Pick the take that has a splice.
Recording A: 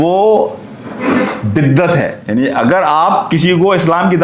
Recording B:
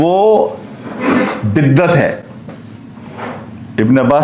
A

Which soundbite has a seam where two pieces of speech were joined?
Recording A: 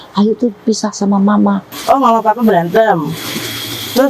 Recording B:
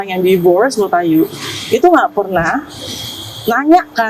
A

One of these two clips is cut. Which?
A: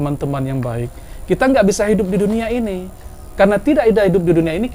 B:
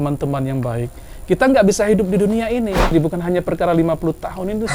B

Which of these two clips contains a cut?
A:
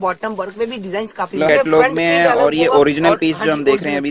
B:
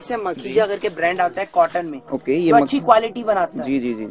A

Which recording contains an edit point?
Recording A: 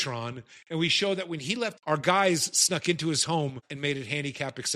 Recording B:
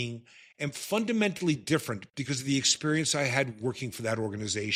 A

